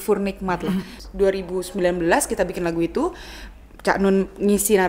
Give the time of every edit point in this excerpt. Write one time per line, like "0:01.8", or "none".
0:00.9